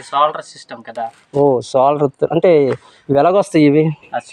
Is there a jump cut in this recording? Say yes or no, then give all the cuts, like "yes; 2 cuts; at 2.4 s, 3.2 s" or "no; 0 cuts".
no; 0 cuts